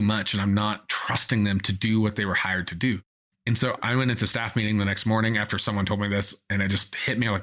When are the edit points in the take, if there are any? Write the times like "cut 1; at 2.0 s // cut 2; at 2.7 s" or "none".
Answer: none